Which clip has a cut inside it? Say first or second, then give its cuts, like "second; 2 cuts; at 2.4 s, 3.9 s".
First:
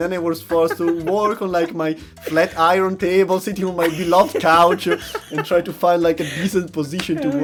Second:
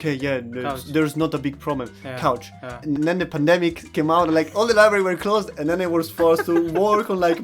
second; 2 cuts; at 2.9 s, 3.8 s